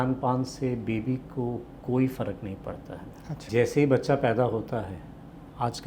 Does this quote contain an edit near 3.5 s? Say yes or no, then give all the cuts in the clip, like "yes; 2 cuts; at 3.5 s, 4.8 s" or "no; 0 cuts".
yes; 1 cut; at 3.5 s